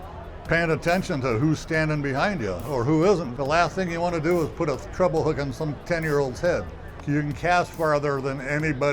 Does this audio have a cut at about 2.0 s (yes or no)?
no